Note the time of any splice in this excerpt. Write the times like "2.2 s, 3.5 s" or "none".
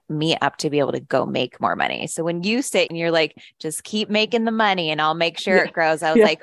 2.9 s